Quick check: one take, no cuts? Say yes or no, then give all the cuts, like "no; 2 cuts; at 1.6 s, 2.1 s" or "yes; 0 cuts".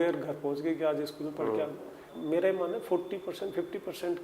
no; 1 cut; at 2.1 s